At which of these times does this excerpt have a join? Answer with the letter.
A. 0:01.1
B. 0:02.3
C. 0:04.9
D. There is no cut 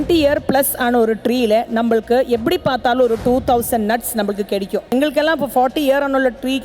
C